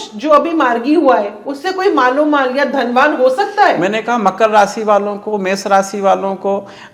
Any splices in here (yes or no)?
no